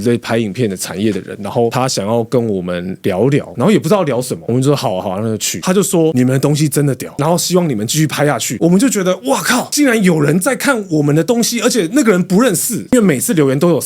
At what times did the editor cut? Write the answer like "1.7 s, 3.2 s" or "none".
5.6 s, 8.5 s, 12.9 s